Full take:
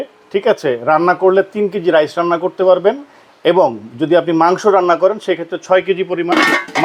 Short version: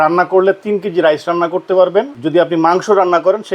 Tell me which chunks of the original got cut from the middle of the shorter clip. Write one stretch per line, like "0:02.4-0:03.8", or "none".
0:03.1-0:03.9